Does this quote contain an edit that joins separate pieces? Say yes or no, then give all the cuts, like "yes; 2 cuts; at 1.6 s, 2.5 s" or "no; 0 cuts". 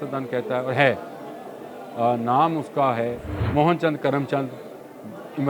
yes; 1 cut; at 3.3 s